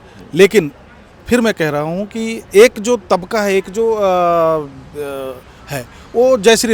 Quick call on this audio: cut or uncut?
uncut